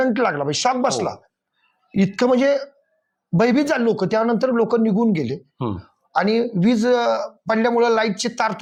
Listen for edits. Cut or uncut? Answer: uncut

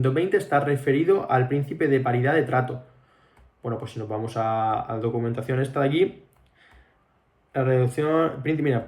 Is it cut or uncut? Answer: uncut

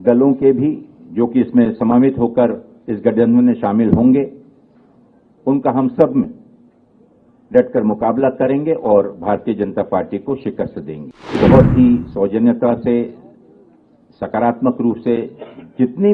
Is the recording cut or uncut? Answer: cut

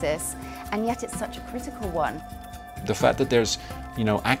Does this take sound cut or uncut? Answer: cut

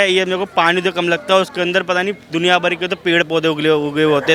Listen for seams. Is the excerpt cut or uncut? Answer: uncut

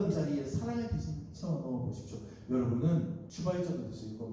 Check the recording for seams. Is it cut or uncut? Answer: cut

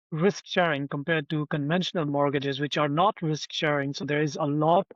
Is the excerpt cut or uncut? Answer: uncut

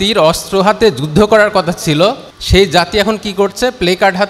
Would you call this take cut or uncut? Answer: cut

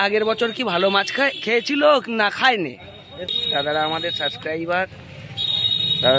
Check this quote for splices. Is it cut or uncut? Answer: cut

